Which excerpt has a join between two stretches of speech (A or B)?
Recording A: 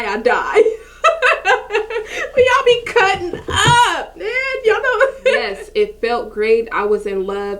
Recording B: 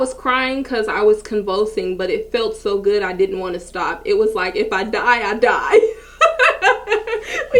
A